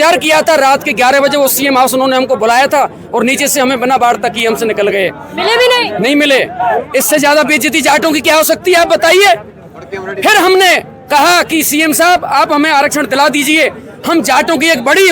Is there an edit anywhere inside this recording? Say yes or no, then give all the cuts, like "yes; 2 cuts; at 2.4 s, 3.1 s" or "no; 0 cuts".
no; 0 cuts